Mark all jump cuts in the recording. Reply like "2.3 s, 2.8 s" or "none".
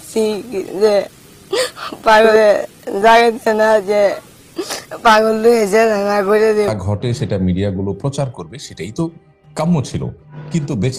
2.3 s, 6.7 s